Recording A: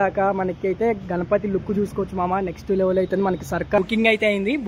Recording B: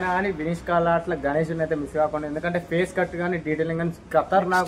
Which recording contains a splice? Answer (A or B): A